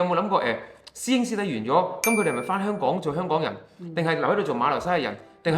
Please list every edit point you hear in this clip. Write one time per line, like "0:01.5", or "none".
none